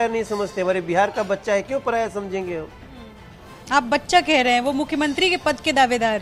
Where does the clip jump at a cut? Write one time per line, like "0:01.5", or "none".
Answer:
none

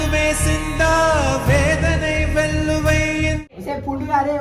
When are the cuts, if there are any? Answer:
0:03.5

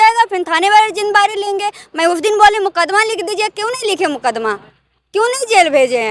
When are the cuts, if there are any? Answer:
none

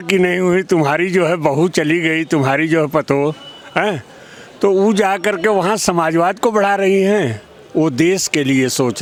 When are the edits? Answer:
none

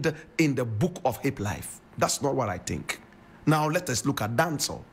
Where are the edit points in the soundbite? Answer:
none

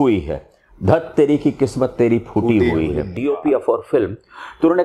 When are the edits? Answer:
0:03.1

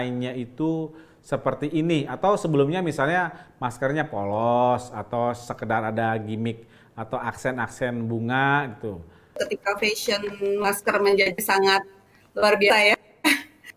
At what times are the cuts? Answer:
0:09.4

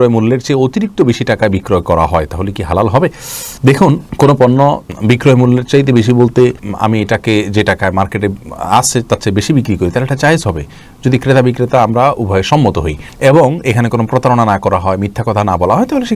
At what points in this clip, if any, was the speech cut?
none

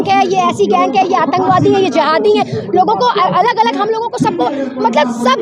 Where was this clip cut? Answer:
none

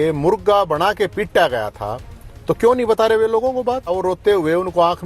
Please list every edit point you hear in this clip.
0:03.9

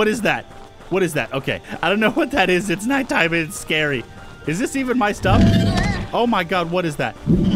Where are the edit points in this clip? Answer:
0:01.7

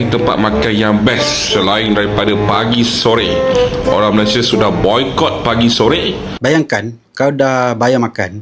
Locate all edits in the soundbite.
0:06.3

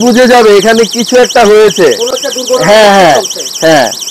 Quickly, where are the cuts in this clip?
none

